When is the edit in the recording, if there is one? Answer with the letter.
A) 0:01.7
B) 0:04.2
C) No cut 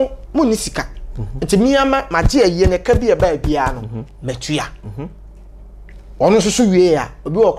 C